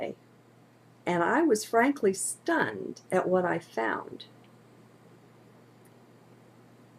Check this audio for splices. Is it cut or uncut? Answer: cut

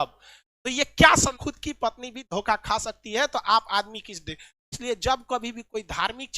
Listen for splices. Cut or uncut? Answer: cut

